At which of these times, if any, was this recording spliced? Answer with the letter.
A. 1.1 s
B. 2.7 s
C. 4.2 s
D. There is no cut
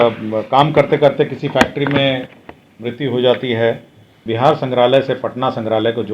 C